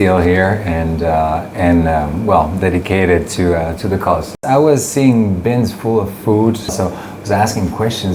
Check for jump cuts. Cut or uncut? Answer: cut